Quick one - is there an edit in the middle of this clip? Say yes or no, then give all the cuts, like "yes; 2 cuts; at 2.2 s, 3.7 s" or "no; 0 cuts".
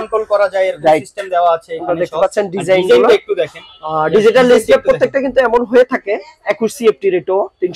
no; 0 cuts